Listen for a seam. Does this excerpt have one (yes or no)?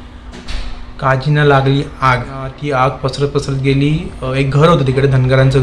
yes